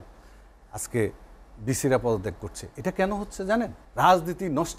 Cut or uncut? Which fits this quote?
cut